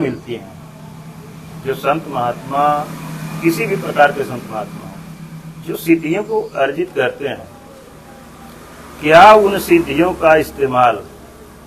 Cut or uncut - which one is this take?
uncut